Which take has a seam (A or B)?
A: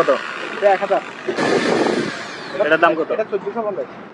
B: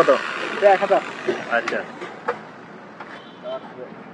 A